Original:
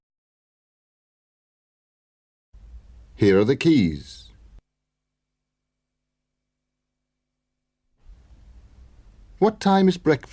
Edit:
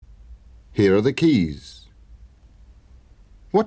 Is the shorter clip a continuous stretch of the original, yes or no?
no